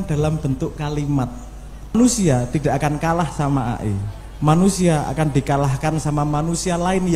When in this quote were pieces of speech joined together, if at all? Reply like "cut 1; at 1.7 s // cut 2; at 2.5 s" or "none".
cut 1; at 1.9 s